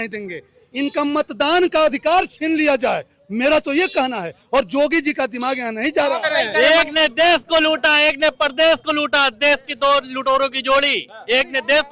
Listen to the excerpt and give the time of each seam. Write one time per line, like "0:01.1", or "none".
0:06.4